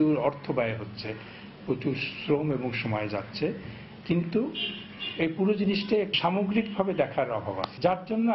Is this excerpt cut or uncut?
uncut